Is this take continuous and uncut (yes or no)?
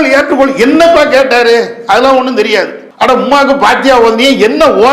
no